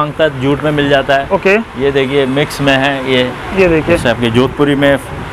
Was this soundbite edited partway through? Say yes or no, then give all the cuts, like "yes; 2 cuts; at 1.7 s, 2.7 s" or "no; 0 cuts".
no; 0 cuts